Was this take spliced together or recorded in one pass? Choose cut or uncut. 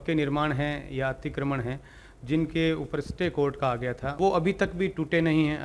cut